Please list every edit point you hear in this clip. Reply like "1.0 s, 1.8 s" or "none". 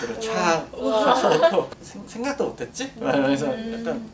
1.8 s